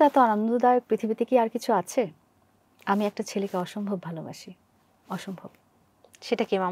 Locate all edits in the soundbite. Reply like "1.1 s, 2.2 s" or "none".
none